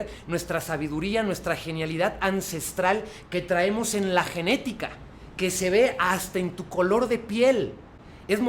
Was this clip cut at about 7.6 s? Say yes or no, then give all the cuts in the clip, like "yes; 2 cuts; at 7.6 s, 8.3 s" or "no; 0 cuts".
no; 0 cuts